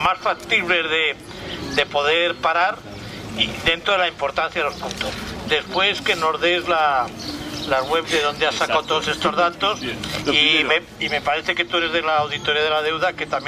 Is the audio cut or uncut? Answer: uncut